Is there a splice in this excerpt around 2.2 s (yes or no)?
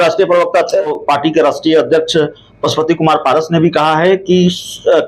no